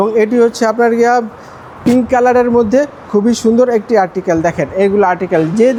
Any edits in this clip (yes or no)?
no